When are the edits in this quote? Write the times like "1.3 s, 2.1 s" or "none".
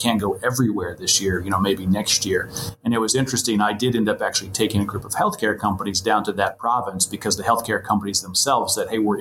none